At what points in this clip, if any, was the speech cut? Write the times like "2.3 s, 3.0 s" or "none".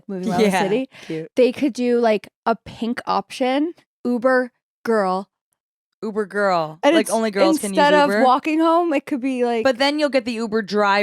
3.9 s